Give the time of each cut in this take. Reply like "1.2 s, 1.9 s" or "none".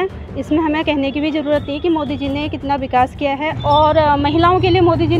3.5 s